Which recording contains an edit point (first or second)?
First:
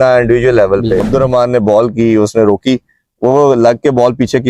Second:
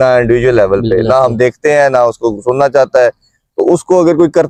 first